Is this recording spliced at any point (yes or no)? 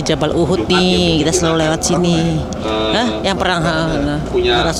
no